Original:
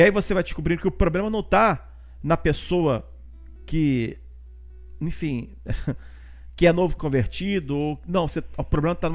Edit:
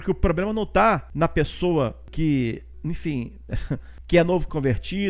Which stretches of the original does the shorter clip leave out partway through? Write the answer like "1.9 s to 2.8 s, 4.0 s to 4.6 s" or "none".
1.8 s to 2.2 s, 3.1 s to 3.6 s, 4.2 s to 4.9 s, 6.1 s to 6.4 s

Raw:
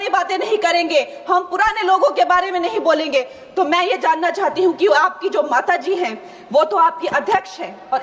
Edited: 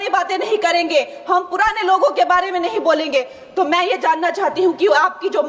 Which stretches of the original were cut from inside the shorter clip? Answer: none

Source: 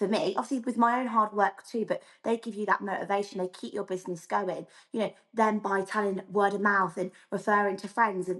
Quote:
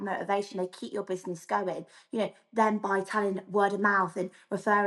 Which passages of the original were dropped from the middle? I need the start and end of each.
none

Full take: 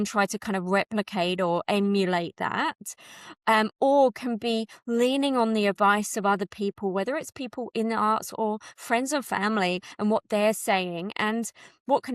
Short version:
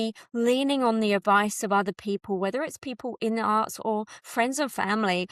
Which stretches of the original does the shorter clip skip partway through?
none

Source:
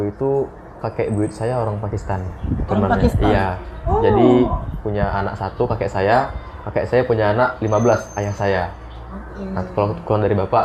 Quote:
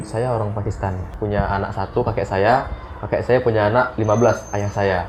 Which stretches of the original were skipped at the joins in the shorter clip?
2.3 s to 4.7 s

